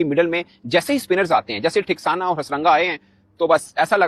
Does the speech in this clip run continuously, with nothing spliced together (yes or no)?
yes